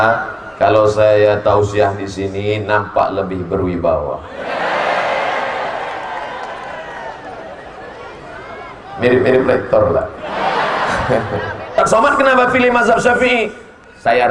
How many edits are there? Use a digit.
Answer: 1